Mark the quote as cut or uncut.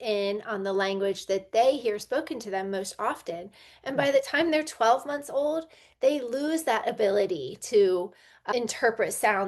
cut